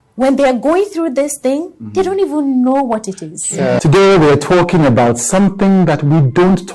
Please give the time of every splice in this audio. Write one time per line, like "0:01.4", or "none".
none